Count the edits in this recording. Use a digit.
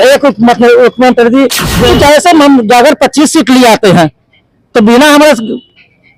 1